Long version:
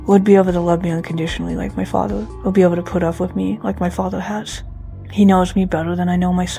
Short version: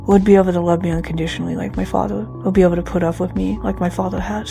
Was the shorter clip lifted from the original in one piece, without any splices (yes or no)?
yes